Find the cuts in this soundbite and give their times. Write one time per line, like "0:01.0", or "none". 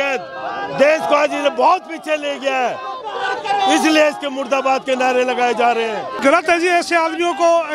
0:06.2

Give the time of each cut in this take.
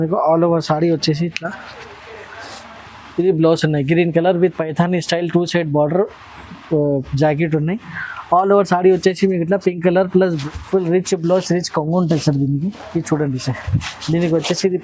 0:10.4

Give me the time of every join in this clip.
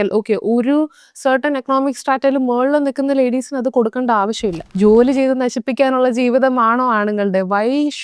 0:04.6

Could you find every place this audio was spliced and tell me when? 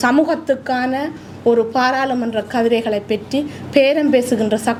none

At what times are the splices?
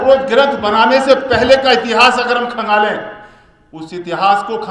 none

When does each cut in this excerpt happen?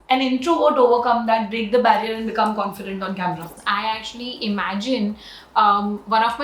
0:03.6

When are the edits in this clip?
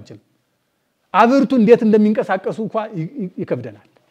none

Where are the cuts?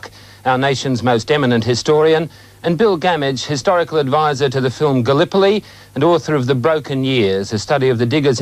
0:06.2

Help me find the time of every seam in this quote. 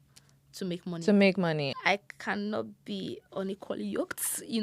0:01.7

